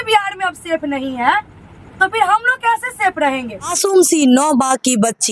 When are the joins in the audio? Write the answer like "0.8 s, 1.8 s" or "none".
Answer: 3.7 s

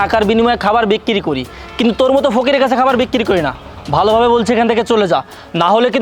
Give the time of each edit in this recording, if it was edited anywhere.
none

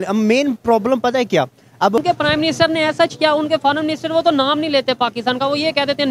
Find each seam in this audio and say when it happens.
2.0 s

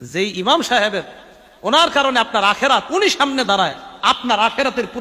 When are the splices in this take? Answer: none

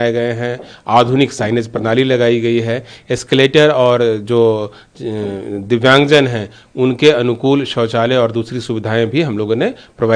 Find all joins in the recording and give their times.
none

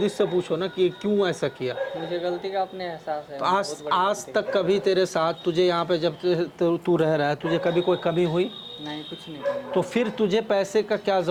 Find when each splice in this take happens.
none

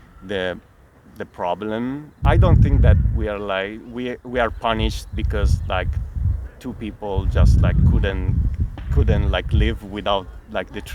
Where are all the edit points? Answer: 2.2 s

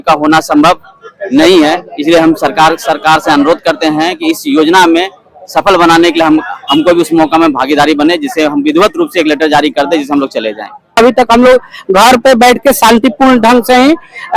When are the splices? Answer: 11.0 s

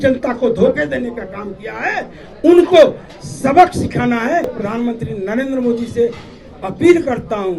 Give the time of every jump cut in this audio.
4.5 s

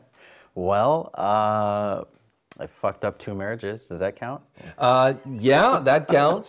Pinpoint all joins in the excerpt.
none

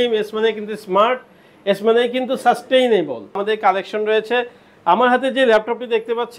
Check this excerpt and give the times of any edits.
3.4 s

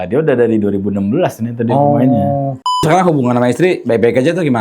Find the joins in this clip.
2.8 s

